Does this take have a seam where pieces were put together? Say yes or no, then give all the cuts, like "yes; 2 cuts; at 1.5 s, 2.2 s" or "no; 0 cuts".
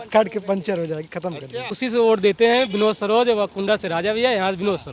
yes; 1 cut; at 1.7 s